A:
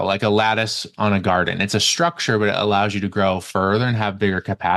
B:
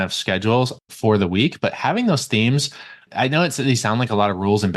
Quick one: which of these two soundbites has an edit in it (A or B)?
B